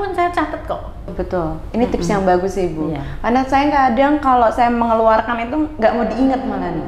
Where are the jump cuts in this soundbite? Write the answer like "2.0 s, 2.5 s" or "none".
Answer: 1.1 s